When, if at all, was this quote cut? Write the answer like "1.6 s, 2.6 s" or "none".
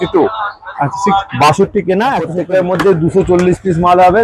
2.3 s